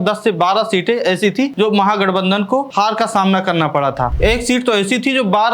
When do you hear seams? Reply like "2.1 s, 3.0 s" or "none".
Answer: 1.5 s, 2.7 s, 4.1 s